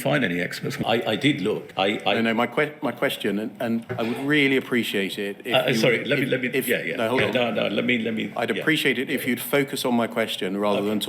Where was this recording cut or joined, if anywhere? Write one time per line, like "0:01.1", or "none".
0:00.8
0:01.7
0:03.9